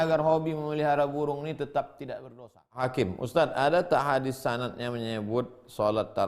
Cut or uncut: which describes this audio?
cut